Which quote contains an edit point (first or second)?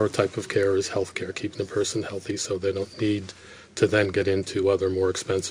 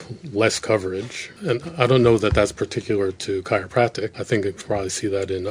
second